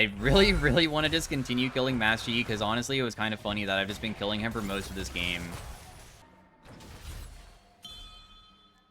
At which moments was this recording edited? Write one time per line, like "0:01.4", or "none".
0:06.2